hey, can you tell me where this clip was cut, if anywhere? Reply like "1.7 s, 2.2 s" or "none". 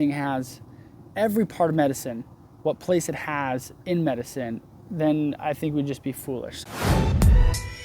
6.6 s